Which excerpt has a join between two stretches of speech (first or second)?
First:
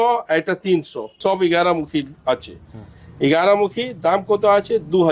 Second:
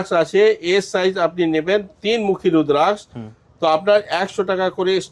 first